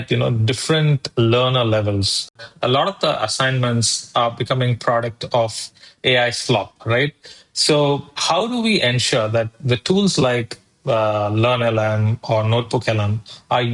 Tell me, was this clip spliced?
yes; 1 cut; at 2.4 s

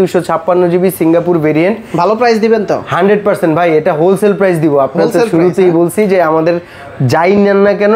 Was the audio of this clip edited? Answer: no; 0 cuts

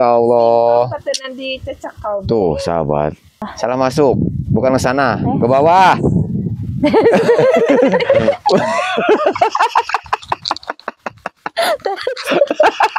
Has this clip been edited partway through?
yes; 1 cut; at 3.5 s

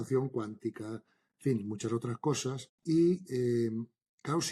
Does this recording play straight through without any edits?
no; 1 cut; at 2.7 s

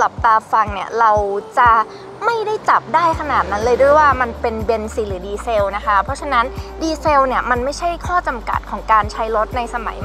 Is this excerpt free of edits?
yes; 0 cuts

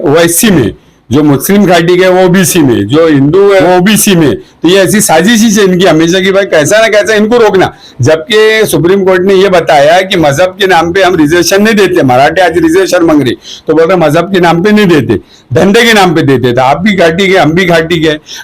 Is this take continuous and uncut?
no; 1 cut; at 3.6 s

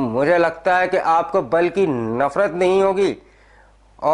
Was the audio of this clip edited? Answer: no; 0 cuts

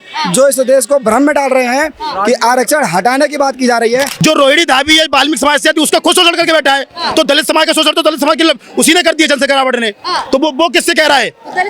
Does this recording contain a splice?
yes; 1 cut; at 4.1 s

